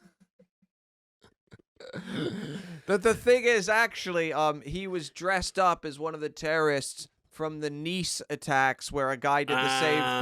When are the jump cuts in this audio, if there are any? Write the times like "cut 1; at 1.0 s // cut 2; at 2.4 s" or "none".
cut 1; at 6.3 s